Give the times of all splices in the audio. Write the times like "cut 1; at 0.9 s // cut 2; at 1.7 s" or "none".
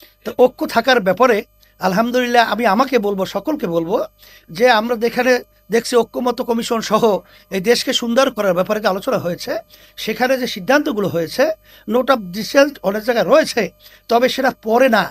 none